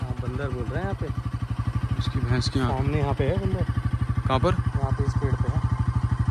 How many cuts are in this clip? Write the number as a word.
zero